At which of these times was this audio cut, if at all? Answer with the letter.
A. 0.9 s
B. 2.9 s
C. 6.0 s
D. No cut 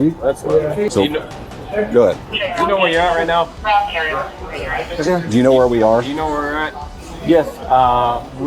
A